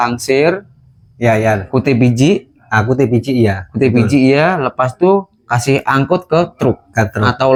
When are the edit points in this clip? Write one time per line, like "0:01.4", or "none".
none